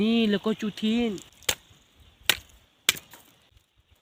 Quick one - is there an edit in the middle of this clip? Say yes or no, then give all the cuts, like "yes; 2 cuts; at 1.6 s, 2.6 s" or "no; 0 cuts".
no; 0 cuts